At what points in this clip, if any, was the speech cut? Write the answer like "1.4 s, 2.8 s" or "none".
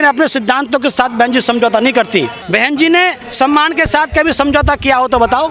2.4 s

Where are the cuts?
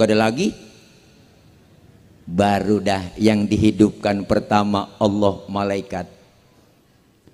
none

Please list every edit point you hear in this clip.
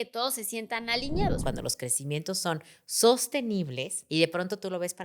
1.4 s, 4.0 s

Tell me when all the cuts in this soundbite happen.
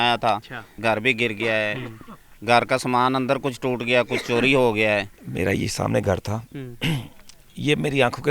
0.8 s, 5.2 s

